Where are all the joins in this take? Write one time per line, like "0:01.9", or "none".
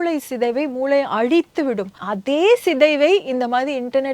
0:02.1